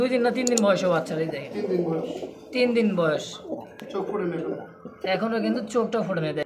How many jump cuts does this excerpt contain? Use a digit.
0